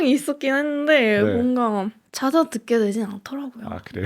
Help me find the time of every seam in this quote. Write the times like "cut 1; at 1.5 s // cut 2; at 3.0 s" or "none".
cut 1; at 2.0 s